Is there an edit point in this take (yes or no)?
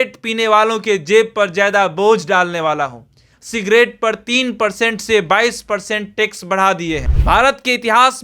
yes